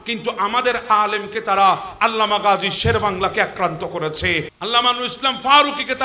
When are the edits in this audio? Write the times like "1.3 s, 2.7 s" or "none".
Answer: 4.5 s